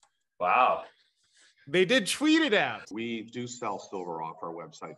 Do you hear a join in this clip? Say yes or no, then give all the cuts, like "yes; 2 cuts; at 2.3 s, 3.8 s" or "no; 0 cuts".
yes; 1 cut; at 2.8 s